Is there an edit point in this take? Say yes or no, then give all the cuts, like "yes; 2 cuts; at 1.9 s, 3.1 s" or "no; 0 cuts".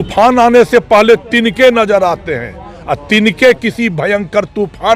no; 0 cuts